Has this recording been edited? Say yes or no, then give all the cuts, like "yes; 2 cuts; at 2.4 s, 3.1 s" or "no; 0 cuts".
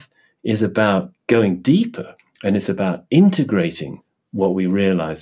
no; 0 cuts